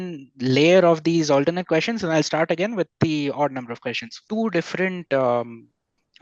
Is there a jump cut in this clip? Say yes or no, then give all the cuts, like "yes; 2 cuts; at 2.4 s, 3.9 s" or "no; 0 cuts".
yes; 1 cut; at 4.1 s